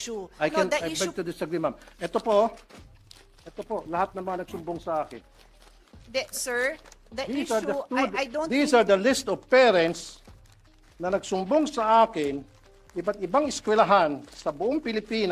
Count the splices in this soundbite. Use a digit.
0